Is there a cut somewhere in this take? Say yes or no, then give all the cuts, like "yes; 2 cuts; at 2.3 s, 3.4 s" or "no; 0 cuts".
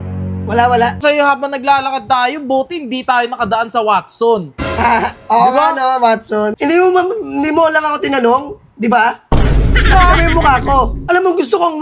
yes; 3 cuts; at 1.0 s, 6.5 s, 11.0 s